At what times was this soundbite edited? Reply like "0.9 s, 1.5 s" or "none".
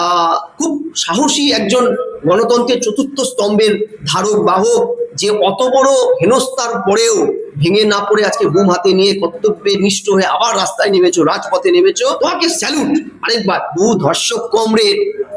12.2 s, 13.7 s